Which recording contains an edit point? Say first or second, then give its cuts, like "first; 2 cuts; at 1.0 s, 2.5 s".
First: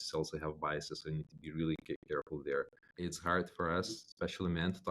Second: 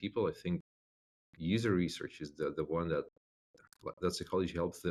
first; 1 cut; at 2.8 s